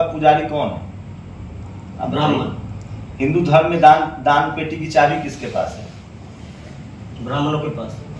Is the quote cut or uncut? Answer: uncut